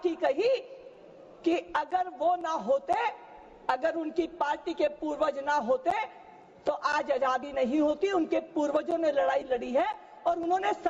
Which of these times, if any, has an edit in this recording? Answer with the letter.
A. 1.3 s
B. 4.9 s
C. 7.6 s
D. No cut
D